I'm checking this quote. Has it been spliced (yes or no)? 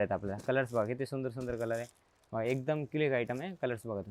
no